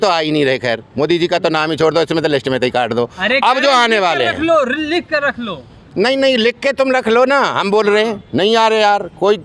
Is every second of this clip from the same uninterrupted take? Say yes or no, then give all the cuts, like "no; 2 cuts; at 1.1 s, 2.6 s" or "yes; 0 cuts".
yes; 0 cuts